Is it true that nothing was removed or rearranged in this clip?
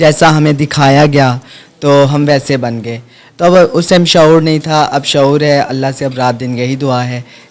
yes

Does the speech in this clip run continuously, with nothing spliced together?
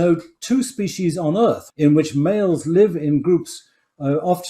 no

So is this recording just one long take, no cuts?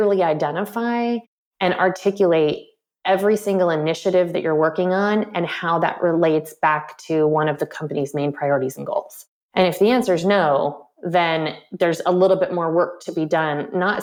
yes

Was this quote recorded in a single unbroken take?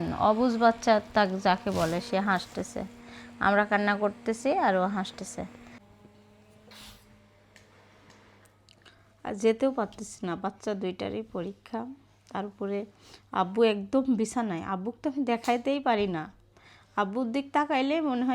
no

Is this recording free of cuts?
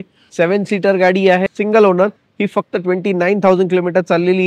no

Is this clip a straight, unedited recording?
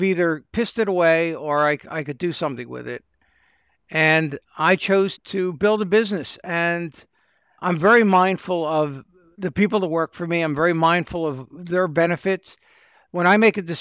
yes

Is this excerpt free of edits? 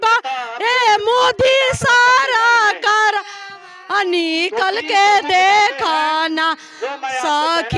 yes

